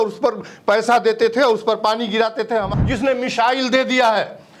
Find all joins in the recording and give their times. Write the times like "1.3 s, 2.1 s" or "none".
2.7 s